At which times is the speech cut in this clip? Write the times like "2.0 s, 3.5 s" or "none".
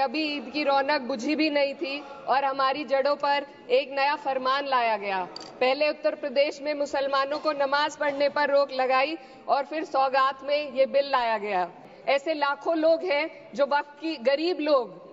11.9 s